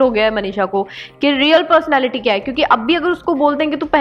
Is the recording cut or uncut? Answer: uncut